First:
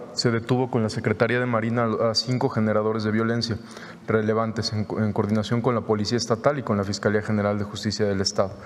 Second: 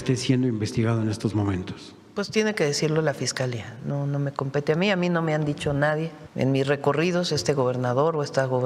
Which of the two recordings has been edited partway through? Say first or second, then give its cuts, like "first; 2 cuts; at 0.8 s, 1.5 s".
second; 1 cut; at 6.2 s